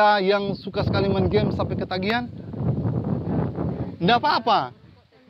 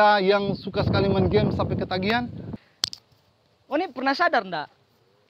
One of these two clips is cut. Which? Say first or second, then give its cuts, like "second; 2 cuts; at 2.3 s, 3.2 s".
second; 1 cut; at 2.5 s